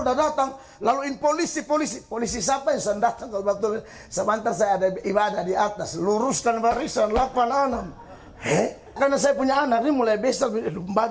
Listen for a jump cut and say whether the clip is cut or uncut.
cut